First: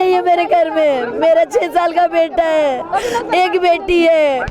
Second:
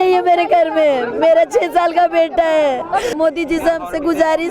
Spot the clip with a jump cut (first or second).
second